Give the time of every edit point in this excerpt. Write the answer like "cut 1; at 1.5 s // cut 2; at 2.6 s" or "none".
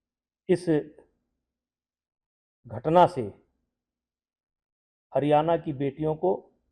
none